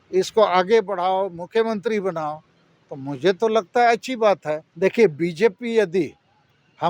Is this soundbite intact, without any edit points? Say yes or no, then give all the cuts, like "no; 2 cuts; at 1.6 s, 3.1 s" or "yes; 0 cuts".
no; 1 cut; at 4.7 s